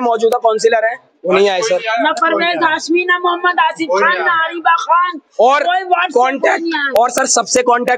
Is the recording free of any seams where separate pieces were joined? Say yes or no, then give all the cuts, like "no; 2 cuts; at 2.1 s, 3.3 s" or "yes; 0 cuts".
yes; 0 cuts